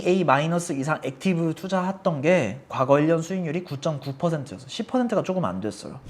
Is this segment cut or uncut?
uncut